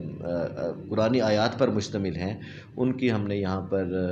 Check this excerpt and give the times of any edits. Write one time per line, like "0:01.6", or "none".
0:02.1